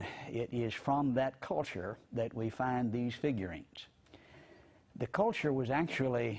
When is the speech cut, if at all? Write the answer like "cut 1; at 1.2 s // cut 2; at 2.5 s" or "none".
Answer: cut 1; at 5.4 s